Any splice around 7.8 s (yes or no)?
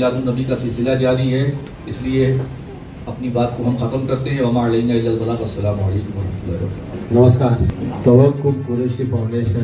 yes